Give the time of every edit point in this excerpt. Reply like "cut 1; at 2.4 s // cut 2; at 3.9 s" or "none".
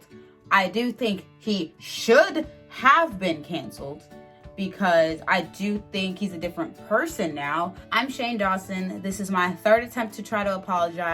cut 1; at 7.8 s